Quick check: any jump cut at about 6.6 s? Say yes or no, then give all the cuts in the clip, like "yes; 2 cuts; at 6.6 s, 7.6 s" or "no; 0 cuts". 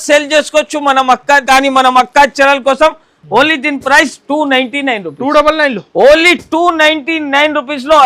no; 1 cut; at 1.4 s